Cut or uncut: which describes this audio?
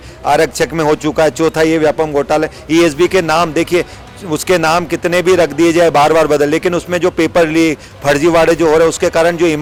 uncut